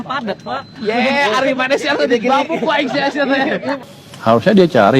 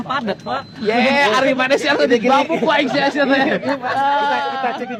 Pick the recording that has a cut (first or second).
first